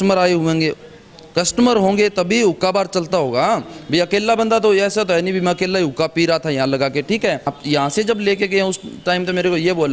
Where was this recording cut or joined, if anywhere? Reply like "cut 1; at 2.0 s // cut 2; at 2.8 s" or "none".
cut 1; at 7.5 s